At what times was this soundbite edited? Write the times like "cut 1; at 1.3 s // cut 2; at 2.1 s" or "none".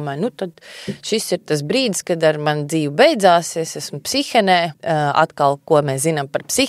cut 1; at 4.8 s